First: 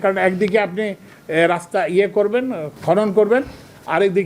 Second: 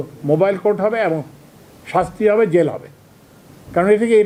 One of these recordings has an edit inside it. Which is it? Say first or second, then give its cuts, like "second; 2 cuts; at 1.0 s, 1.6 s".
first; 1 cut; at 2.7 s